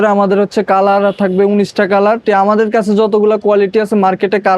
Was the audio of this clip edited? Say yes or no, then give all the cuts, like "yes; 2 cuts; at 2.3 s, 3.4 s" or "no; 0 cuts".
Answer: yes; 1 cut; at 2.2 s